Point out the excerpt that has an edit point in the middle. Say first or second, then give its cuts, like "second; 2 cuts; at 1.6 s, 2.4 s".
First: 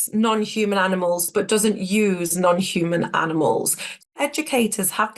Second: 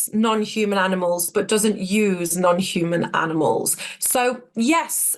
first; 1 cut; at 4.1 s